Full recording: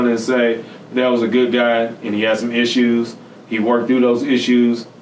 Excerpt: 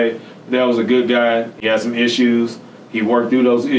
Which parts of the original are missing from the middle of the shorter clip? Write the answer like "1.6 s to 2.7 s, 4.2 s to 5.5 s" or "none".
2.0 s to 2.1 s